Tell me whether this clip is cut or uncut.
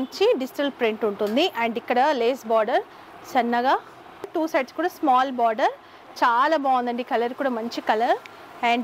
cut